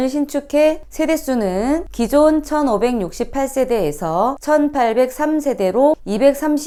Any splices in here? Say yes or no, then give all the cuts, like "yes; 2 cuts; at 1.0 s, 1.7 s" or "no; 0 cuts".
no; 0 cuts